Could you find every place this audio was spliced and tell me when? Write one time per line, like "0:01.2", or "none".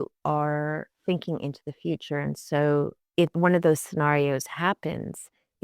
0:03.0